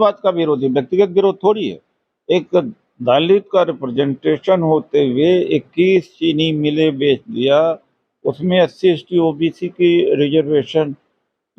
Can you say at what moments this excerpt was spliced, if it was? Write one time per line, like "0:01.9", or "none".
none